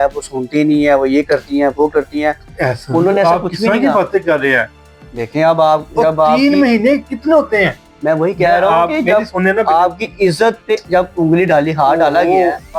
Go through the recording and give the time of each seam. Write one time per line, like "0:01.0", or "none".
none